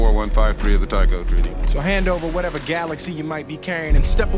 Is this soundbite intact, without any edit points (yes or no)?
no